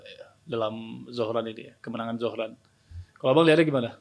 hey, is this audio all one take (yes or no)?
yes